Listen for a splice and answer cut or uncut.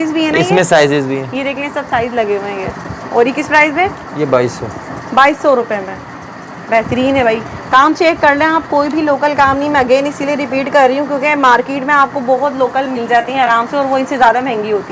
uncut